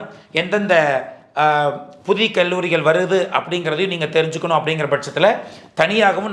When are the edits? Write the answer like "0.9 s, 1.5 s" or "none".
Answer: none